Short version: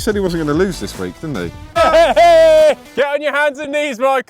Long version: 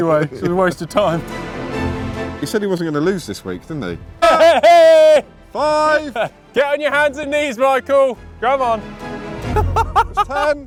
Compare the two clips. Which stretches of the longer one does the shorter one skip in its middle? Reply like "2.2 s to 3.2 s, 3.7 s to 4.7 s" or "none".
5.3 s to 6.4 s